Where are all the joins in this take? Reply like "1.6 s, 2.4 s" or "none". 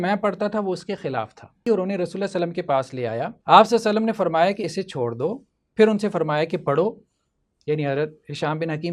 1.7 s, 3.3 s